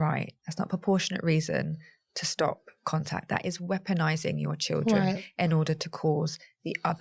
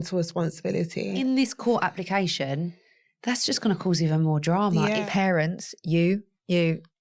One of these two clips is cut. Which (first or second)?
second